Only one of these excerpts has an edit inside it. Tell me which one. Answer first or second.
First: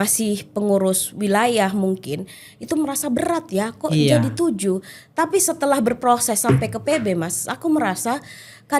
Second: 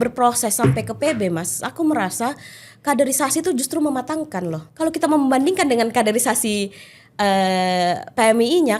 second